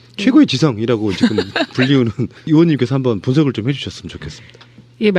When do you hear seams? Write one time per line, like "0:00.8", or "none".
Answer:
0:04.0

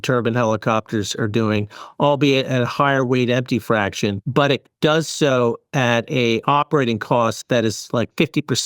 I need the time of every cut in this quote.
0:04.2

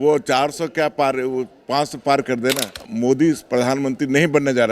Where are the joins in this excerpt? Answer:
0:02.8

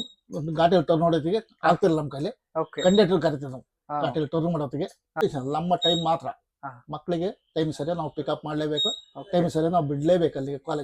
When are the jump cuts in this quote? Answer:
0:05.2

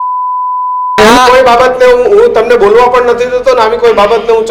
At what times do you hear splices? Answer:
0:01.0

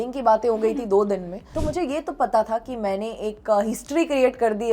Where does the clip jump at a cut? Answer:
0:01.5

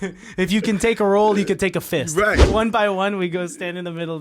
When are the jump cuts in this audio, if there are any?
0:02.4

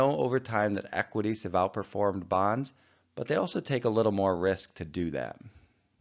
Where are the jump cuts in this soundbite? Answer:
0:03.6

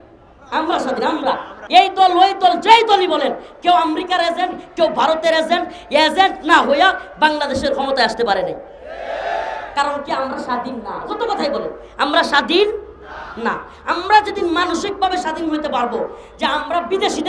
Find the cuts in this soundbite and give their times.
0:01.5

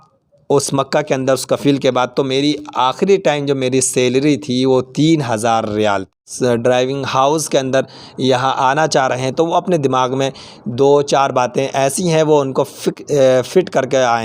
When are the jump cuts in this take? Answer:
0:06.3

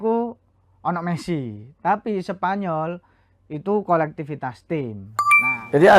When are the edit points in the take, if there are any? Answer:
0:05.0

